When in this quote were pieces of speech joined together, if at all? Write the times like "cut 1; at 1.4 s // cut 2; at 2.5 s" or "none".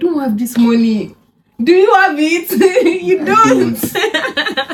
none